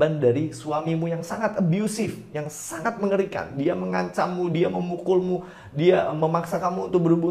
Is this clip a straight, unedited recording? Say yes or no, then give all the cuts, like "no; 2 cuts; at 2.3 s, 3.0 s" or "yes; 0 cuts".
yes; 0 cuts